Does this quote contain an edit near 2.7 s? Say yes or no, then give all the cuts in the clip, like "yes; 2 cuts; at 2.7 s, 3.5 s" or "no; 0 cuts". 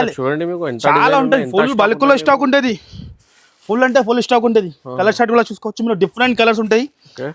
no; 0 cuts